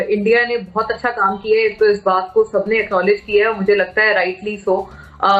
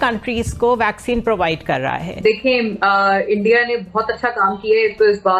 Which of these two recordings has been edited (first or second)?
second